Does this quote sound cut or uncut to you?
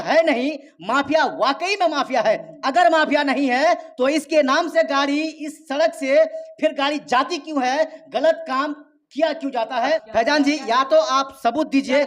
cut